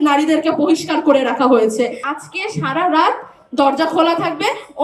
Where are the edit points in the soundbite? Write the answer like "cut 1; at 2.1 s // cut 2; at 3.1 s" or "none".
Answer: cut 1; at 2.0 s